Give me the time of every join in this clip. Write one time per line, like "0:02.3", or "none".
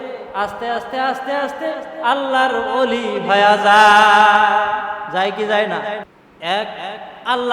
0:06.1